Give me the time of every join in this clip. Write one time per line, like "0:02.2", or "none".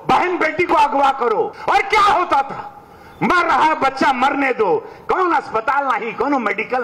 0:01.6